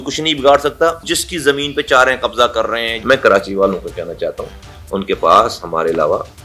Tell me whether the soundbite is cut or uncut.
cut